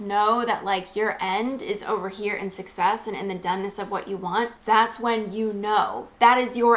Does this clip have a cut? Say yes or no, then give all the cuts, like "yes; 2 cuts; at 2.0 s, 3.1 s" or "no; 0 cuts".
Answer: yes; 1 cut; at 4.6 s